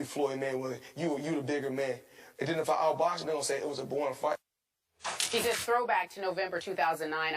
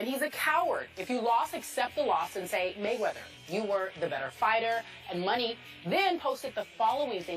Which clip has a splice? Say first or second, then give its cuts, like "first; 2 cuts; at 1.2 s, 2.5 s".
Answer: first; 1 cut; at 2.9 s